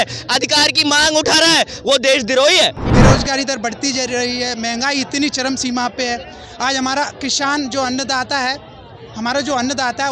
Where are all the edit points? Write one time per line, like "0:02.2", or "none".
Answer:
0:02.8